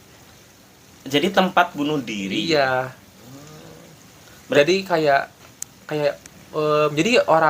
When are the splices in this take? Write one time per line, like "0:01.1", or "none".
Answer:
none